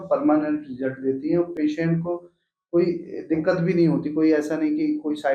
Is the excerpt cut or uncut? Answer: uncut